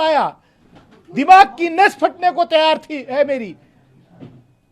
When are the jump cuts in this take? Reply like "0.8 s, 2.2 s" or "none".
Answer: none